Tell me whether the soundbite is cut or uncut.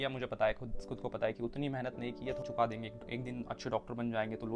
cut